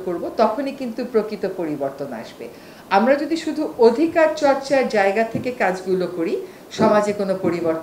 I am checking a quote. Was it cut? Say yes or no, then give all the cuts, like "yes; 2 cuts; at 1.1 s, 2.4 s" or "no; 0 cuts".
no; 0 cuts